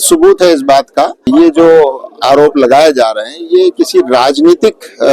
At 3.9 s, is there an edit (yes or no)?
no